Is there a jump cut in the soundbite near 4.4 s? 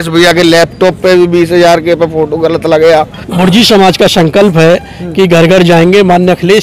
no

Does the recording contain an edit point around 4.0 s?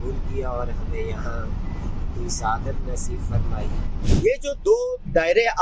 yes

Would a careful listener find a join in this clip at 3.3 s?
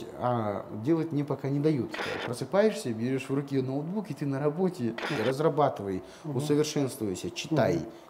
no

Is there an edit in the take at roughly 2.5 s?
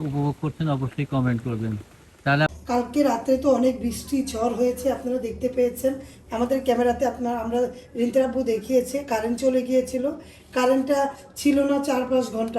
yes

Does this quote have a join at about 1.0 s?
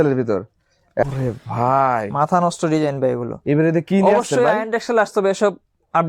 yes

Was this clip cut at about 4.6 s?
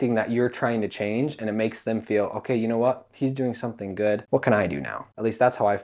yes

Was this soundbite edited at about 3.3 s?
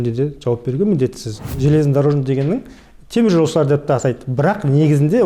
no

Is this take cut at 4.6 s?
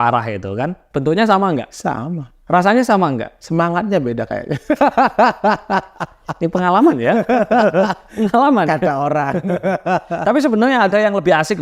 no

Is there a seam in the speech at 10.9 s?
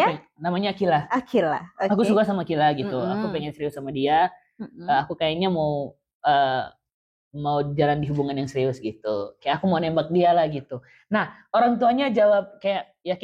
no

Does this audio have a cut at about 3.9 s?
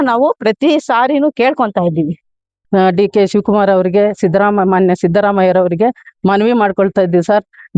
no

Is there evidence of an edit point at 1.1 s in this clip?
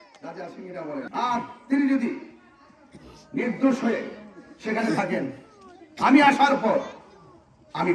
yes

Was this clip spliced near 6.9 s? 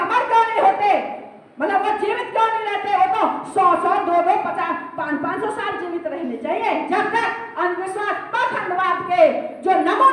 yes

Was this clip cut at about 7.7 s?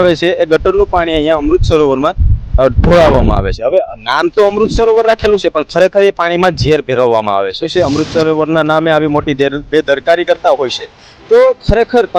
yes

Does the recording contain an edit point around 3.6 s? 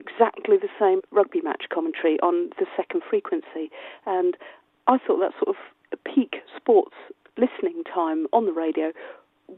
no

